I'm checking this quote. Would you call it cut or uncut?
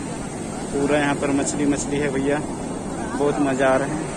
uncut